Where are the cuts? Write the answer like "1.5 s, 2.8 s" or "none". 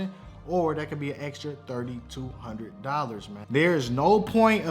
3.4 s